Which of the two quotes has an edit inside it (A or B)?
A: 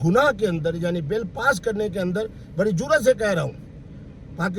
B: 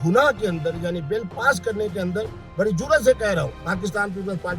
B